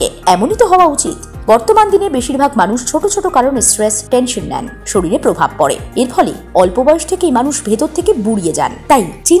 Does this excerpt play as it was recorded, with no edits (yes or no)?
yes